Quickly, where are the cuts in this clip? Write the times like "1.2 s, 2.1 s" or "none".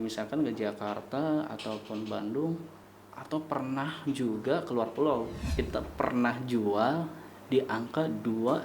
5.6 s

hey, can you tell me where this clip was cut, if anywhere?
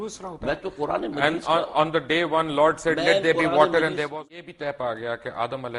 4.0 s

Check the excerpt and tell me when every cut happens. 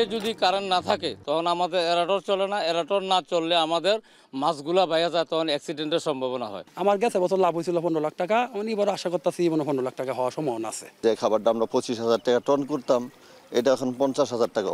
6.6 s, 10.9 s

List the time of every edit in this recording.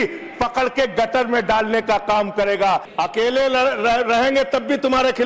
2.9 s

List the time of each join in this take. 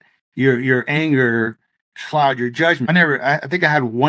2.9 s

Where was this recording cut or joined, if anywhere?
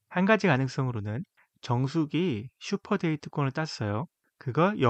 none

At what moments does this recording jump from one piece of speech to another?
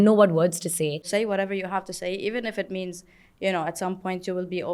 1.0 s

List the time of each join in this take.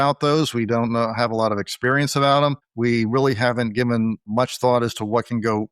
2.7 s, 4.2 s

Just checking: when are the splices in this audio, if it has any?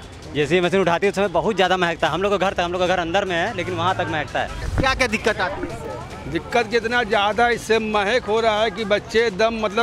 4.6 s

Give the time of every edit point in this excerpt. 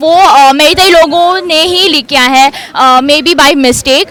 none

